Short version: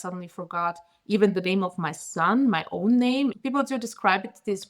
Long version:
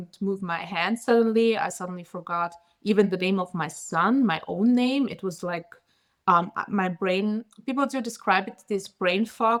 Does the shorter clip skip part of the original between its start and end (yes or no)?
yes